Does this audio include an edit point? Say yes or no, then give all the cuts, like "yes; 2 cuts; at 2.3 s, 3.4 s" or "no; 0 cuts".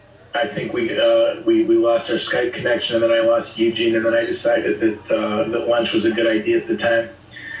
yes; 1 cut; at 2.0 s